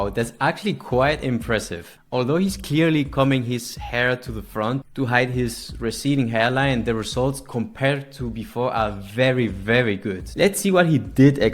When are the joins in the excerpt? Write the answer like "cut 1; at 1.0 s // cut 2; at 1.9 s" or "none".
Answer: none